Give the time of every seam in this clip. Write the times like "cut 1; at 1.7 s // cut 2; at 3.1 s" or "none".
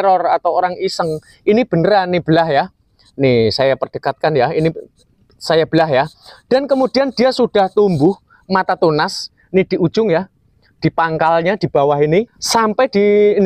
cut 1; at 12.4 s